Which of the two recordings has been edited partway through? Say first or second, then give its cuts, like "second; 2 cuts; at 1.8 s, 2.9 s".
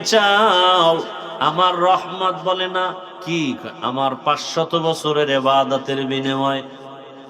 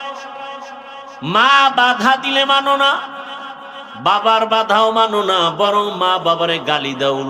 first; 2 cuts; at 1.2 s, 3.1 s